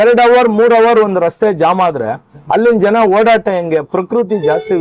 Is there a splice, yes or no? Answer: no